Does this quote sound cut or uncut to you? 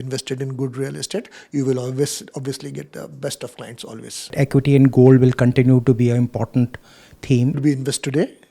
cut